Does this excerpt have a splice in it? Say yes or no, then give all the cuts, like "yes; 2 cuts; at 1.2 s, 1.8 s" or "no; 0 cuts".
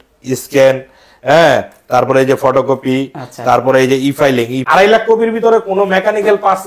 yes; 1 cut; at 4.6 s